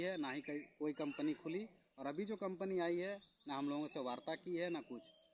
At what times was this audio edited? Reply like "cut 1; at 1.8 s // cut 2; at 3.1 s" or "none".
none